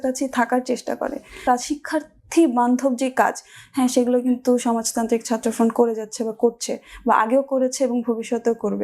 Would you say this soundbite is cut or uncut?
cut